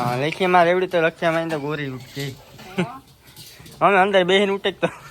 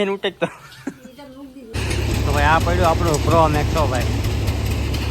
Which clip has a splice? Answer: second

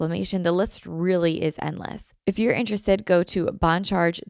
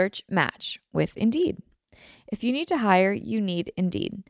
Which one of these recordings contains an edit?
first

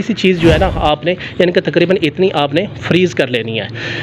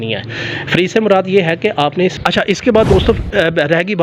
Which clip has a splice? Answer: second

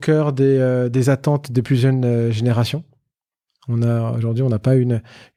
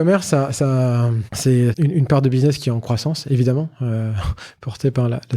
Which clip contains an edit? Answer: second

